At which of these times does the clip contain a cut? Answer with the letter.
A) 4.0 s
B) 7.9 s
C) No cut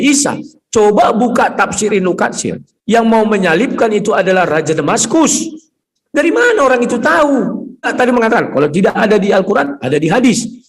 B